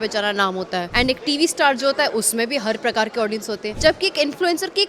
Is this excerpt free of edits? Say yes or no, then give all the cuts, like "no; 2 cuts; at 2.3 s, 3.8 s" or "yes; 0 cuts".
no; 2 cuts; at 0.9 s, 3.7 s